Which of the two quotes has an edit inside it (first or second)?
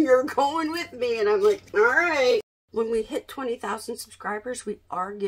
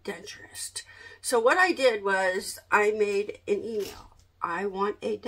first